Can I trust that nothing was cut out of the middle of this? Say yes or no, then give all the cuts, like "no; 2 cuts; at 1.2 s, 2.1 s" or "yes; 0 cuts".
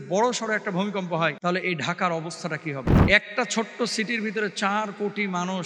no; 2 cuts; at 1.4 s, 2.9 s